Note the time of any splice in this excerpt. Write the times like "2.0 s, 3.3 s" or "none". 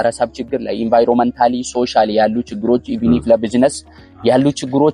none

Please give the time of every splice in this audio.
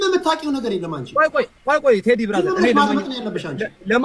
none

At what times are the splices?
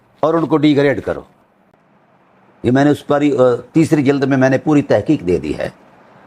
none

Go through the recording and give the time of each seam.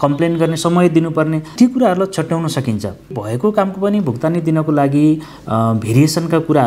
1.5 s, 3.1 s

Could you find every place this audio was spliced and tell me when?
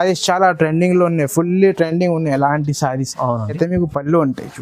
3.6 s

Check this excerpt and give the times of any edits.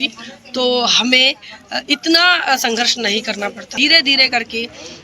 3.8 s

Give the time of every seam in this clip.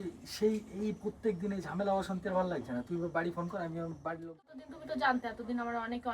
4.5 s

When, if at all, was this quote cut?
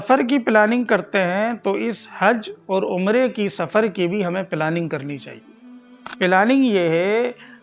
6.0 s

